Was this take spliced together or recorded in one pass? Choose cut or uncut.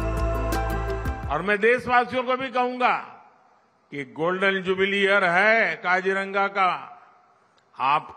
cut